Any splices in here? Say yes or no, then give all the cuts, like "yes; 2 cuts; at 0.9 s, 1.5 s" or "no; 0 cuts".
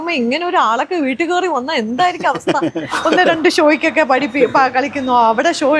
yes; 1 cut; at 2.9 s